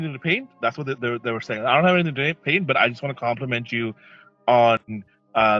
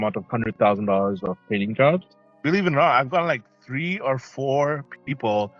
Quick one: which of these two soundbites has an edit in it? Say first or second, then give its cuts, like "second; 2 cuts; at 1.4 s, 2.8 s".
second; 1 cut; at 2.3 s